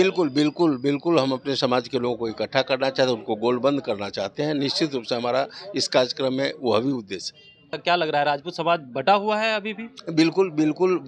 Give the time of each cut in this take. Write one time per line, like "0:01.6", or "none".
0:07.7